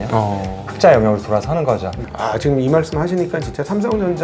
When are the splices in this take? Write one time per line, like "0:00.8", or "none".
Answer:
0:02.0